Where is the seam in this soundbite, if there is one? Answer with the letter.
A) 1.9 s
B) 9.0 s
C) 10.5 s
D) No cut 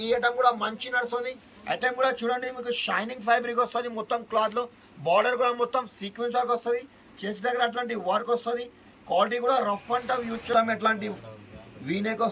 C